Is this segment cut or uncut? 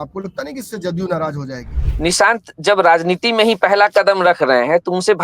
cut